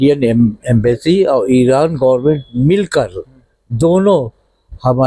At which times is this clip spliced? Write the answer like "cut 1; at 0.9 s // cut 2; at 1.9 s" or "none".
none